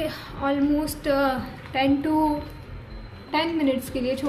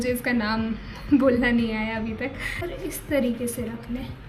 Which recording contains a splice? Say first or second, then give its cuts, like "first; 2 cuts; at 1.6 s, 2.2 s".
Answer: second; 1 cut; at 2.6 s